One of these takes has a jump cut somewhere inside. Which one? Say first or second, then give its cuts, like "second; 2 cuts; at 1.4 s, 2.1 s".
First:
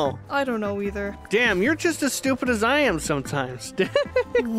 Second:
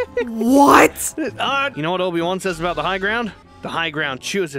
second; 1 cut; at 1.7 s